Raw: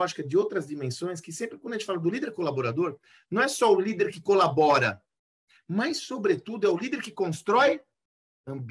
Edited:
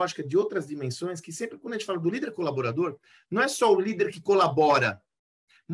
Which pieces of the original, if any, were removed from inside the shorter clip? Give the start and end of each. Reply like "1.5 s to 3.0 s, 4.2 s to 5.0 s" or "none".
none